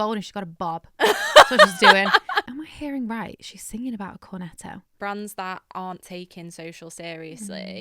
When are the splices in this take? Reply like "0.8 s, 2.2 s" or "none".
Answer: 2.5 s, 4.9 s